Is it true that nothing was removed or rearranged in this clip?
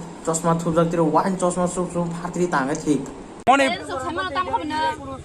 no; 1 cut; at 3.4 s

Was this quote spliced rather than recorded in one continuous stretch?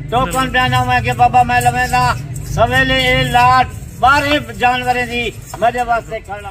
no; 0 cuts

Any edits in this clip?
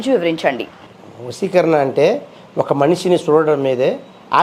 no; 0 cuts

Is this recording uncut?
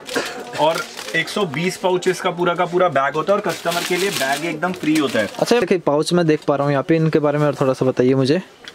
no; 1 cut; at 5.6 s

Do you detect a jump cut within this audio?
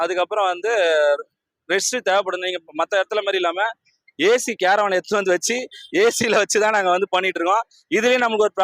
no; 0 cuts

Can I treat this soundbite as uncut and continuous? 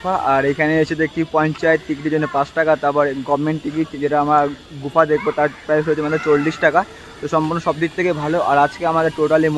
yes; 0 cuts

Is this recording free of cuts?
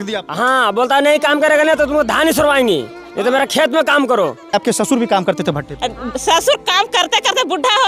no; 1 cut; at 4.5 s

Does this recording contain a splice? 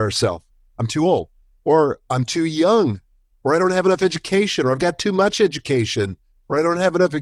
no; 0 cuts

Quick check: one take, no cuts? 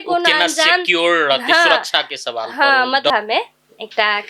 no; 1 cut; at 3.1 s

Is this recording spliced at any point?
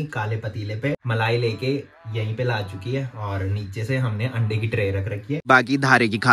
yes; 2 cuts; at 1.0 s, 5.5 s

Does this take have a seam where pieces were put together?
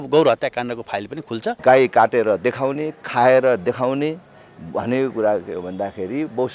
yes; 1 cut; at 1.6 s

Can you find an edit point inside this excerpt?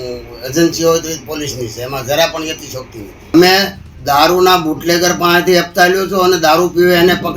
yes; 1 cut; at 3.3 s

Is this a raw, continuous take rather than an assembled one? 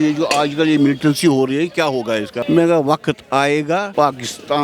no; 1 cut; at 2.3 s

